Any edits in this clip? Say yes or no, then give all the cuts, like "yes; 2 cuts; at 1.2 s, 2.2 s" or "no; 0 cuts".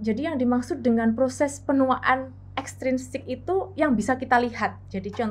no; 0 cuts